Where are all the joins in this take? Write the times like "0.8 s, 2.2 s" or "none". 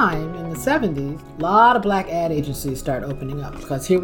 1.2 s